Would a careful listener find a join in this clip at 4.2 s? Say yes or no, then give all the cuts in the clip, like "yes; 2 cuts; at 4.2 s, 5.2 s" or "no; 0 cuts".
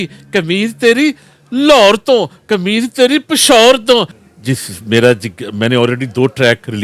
yes; 1 cut; at 4.2 s